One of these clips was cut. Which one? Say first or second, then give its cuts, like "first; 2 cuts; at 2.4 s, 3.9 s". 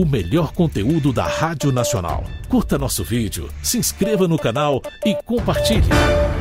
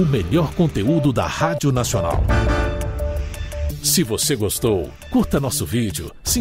first; 2 cuts; at 2.3 s, 5.5 s